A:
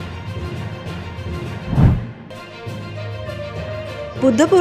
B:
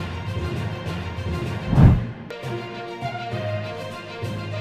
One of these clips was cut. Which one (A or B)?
A